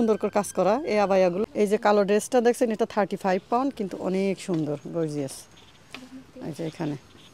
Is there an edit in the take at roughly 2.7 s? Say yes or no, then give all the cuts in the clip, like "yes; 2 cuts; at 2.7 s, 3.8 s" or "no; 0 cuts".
no; 1 cut; at 1.4 s